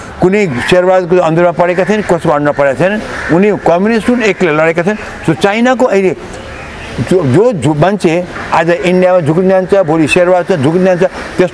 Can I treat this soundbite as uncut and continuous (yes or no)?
yes